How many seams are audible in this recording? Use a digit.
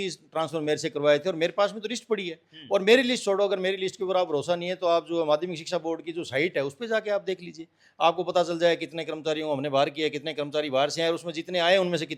0